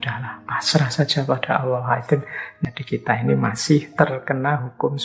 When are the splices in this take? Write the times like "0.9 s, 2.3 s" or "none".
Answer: 2.4 s, 3.9 s